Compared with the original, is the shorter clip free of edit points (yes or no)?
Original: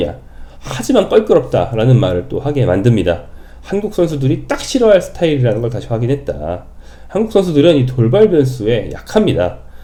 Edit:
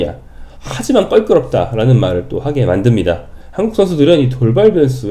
no